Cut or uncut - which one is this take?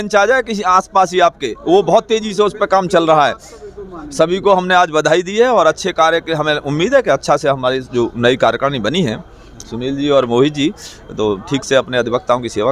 uncut